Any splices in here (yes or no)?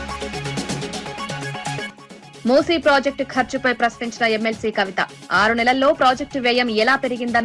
yes